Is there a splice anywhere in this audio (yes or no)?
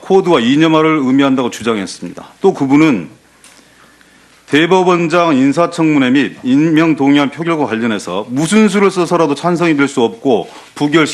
no